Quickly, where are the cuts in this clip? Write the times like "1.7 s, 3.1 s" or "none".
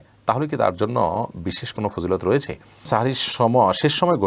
2.9 s